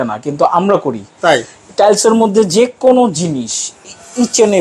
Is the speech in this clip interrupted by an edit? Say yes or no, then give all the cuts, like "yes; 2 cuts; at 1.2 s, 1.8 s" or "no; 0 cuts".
no; 0 cuts